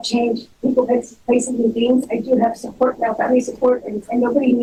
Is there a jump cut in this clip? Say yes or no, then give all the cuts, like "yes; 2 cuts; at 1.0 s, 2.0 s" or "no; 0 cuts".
no; 0 cuts